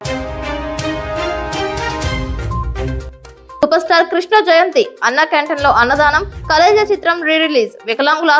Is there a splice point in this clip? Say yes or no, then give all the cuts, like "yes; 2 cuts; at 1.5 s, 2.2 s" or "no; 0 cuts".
yes; 1 cut; at 3.0 s